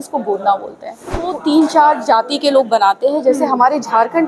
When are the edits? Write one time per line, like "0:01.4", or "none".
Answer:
0:01.3